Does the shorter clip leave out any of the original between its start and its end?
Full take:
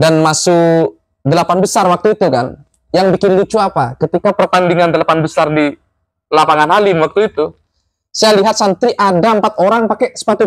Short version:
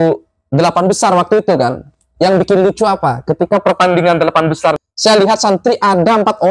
yes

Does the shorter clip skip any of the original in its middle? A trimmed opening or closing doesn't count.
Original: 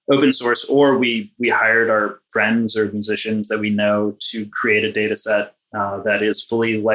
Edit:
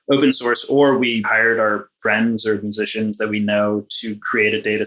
yes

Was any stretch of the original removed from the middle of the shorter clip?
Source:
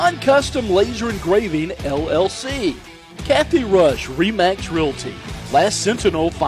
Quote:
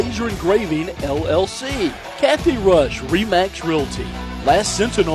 yes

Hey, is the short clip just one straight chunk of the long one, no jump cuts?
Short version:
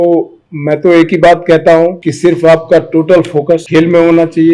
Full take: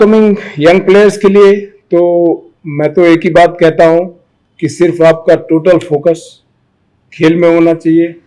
no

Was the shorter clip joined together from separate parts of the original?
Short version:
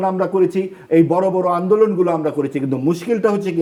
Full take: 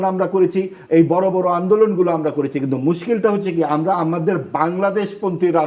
no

